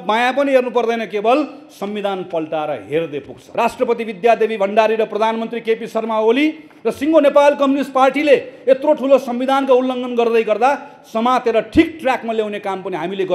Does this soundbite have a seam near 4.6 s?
no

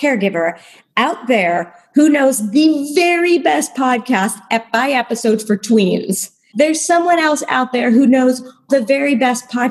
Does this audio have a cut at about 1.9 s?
no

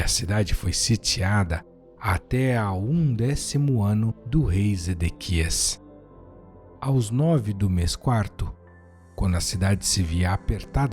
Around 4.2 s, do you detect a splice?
yes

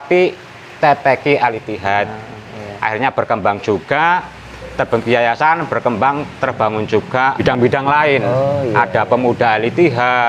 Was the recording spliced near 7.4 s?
yes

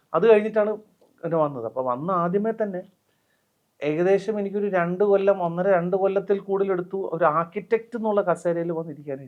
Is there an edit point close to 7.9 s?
no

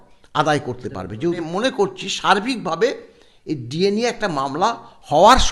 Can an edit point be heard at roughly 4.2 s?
no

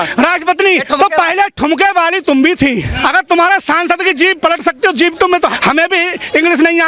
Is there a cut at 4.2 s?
no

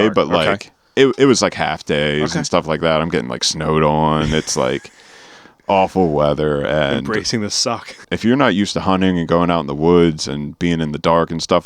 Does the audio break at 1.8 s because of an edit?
no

